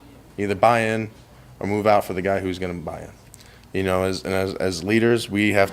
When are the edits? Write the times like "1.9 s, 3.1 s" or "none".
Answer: 3.3 s